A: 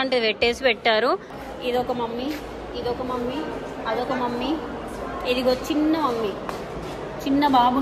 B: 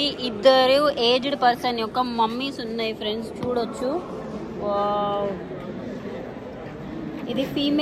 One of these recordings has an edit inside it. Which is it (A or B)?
A